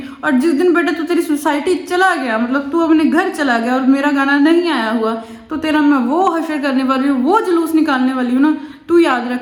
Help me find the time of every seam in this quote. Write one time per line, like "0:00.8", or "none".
none